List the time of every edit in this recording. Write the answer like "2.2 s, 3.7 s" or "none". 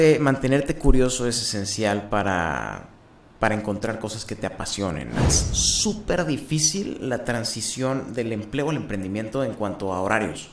5.3 s